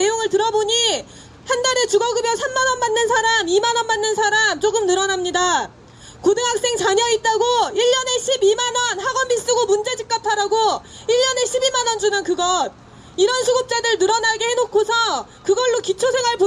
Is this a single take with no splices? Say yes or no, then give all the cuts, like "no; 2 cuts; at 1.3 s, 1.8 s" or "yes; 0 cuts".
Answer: yes; 0 cuts